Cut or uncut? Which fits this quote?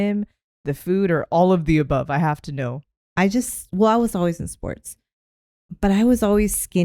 cut